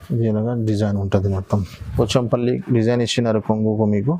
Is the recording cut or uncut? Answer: cut